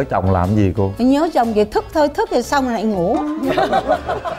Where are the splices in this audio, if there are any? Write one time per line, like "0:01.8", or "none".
none